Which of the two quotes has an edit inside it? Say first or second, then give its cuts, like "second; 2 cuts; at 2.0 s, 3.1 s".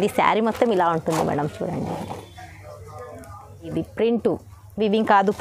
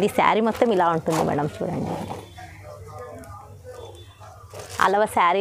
first; 1 cut; at 3.7 s